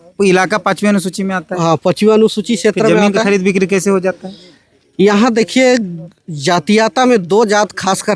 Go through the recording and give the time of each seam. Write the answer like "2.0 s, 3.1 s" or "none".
none

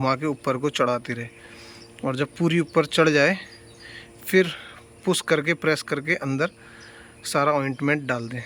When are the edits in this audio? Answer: none

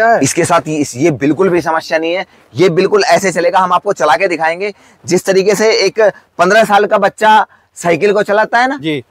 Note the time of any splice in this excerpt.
none

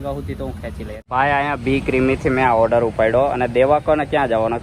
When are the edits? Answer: 1.0 s

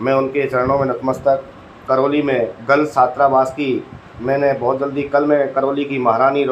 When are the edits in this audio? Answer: 1.8 s

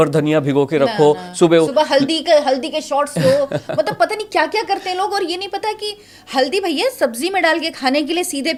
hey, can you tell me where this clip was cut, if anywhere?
none

